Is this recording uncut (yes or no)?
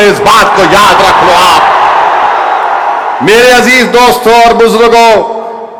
yes